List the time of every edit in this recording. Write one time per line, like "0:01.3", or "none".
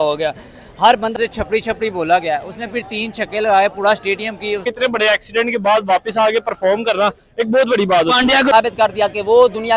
0:01.2
0:04.6
0:08.5